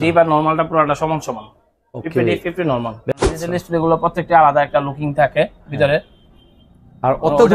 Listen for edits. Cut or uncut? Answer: cut